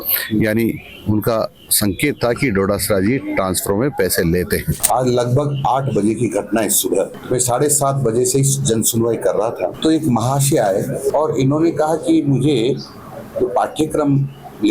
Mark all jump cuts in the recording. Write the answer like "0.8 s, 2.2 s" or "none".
4.7 s, 7.2 s, 9.8 s, 11.1 s